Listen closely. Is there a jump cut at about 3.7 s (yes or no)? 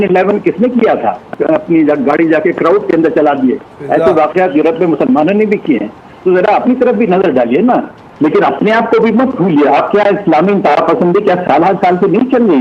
no